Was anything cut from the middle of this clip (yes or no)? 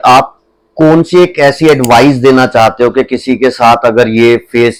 no